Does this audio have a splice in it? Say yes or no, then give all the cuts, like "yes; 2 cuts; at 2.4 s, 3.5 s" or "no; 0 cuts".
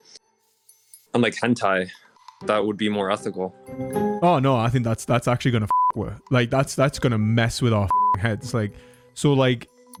no; 0 cuts